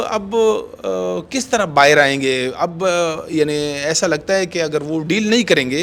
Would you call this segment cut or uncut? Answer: uncut